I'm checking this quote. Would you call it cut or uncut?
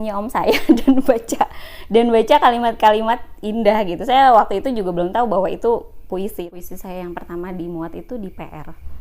cut